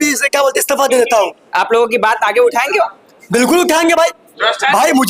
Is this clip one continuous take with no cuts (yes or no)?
yes